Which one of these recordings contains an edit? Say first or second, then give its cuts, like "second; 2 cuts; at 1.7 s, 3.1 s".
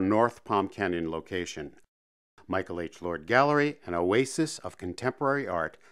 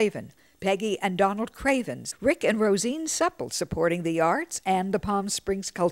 second; 1 cut; at 2.0 s